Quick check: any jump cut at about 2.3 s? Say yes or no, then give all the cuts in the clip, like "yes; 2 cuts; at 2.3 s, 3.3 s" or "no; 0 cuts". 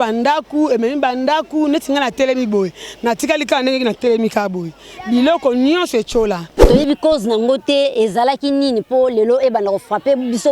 no; 1 cut; at 6.6 s